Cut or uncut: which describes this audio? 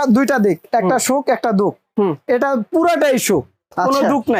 uncut